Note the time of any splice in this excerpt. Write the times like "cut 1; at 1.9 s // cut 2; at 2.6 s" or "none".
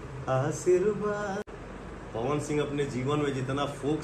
cut 1; at 1.5 s